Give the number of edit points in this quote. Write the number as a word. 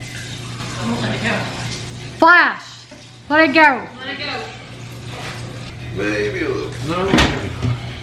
one